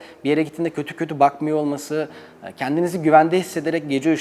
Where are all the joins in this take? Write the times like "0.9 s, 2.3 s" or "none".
none